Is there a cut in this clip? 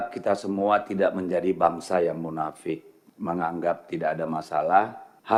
no; 0 cuts

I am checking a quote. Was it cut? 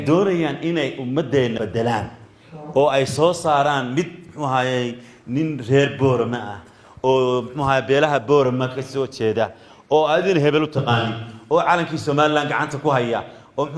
yes; 1 cut; at 1.6 s

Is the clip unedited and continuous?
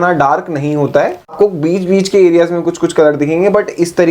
no; 1 cut; at 1.3 s

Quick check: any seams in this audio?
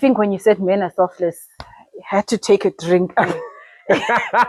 no; 0 cuts

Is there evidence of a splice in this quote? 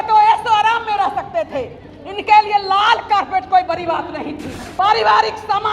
yes; 1 cut; at 4.6 s

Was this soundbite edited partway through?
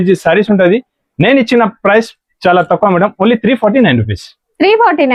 no; 0 cuts

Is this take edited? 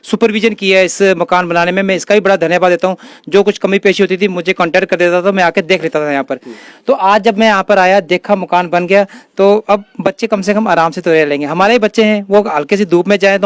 no; 0 cuts

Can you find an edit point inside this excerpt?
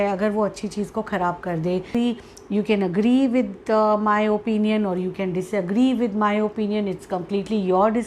yes; 1 cut; at 1.9 s

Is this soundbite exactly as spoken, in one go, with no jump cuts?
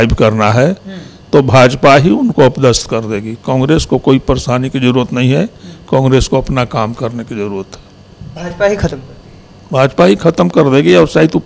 yes; 0 cuts

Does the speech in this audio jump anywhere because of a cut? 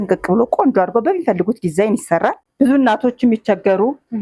yes; 1 cut; at 2.4 s

